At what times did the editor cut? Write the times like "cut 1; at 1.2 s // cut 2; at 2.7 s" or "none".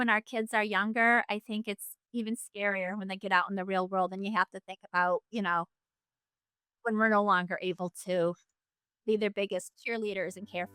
cut 1; at 9.7 s